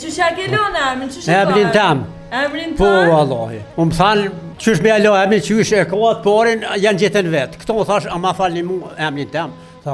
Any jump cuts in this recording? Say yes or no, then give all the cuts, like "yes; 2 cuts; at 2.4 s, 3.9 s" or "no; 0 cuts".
yes; 2 cuts; at 3.6 s, 4.5 s